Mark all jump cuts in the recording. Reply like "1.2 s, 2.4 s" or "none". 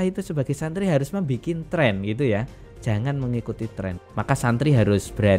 4.0 s